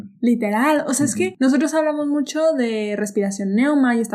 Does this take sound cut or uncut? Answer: cut